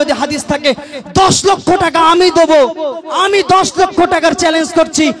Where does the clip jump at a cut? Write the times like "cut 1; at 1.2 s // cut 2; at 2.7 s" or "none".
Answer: none